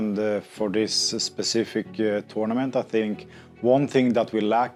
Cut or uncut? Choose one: uncut